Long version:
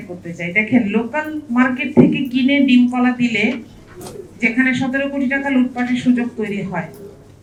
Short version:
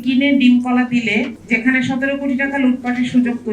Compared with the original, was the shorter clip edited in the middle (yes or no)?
yes